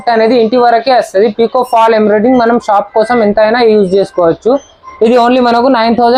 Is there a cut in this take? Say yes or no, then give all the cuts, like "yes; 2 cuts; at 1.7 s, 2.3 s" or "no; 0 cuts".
no; 0 cuts